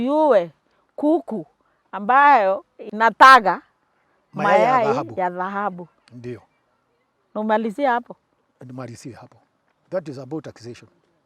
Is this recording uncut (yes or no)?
no